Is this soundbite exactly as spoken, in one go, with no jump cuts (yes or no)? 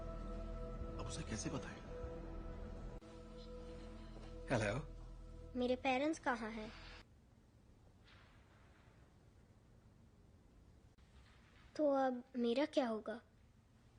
no